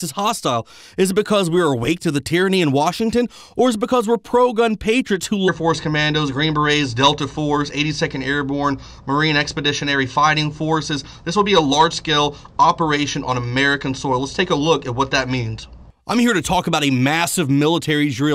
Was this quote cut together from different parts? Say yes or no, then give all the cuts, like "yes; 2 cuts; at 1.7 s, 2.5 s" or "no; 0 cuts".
no; 0 cuts